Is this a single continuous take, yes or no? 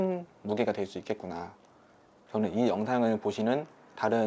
no